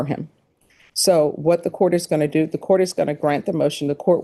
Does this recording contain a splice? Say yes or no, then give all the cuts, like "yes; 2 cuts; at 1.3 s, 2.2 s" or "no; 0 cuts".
no; 0 cuts